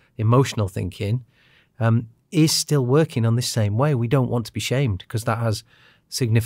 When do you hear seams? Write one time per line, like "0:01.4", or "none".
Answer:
none